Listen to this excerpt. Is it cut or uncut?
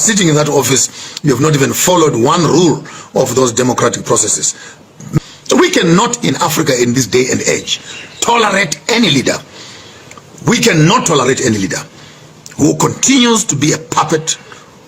cut